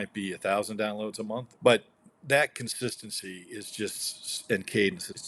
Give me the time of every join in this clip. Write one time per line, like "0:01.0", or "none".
0:01.5